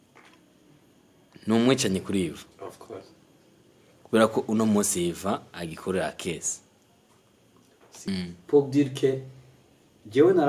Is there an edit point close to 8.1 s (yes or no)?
yes